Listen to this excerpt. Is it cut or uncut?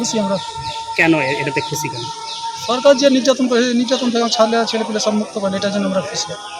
uncut